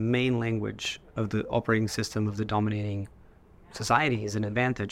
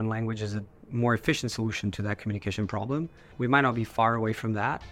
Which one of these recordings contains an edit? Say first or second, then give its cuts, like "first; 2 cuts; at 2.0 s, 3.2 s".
second; 1 cut; at 3.3 s